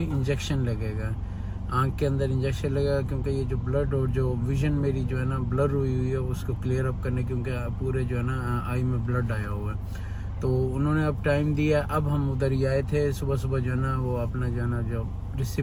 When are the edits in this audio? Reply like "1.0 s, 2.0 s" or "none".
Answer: none